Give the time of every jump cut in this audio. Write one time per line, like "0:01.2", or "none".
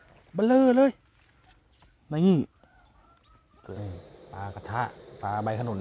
0:03.8